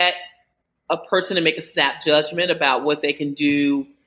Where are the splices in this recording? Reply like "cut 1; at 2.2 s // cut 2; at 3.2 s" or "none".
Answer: none